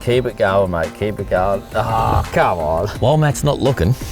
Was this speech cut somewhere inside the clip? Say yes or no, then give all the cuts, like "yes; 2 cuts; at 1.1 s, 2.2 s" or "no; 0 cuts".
yes; 1 cut; at 2.9 s